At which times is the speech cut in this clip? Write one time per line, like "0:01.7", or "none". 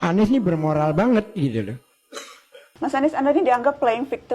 0:02.6